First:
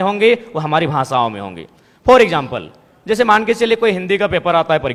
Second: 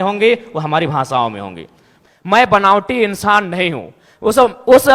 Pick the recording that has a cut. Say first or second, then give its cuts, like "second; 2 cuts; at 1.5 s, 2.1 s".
second; 1 cut; at 1.8 s